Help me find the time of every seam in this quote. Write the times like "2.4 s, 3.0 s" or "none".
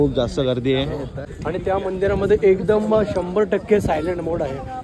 1.3 s